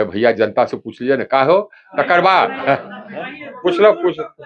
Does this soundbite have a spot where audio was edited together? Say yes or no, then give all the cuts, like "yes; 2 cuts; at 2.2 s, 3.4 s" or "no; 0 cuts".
no; 0 cuts